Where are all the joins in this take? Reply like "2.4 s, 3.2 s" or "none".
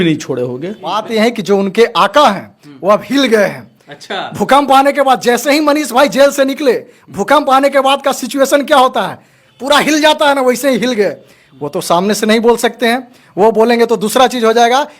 1.0 s